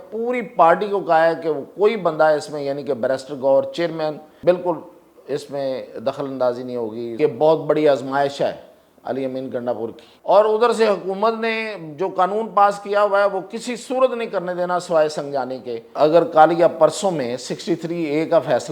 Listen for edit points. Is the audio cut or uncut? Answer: cut